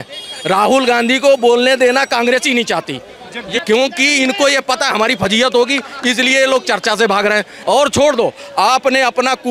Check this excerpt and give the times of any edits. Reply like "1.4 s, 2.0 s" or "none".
3.5 s, 7.5 s